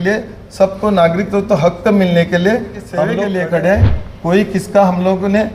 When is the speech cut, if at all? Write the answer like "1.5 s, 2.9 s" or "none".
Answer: 3.0 s